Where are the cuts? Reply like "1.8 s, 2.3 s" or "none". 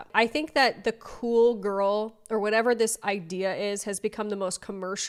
none